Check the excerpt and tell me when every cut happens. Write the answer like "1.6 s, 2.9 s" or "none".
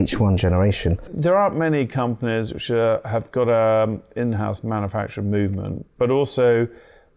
1.1 s